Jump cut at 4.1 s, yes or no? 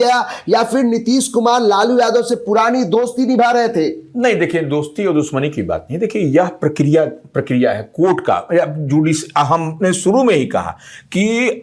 no